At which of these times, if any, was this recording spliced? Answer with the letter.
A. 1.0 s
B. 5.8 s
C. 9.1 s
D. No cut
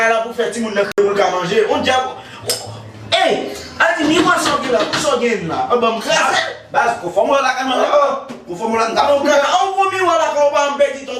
A